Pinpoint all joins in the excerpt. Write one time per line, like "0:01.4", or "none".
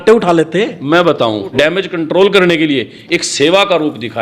0:01.5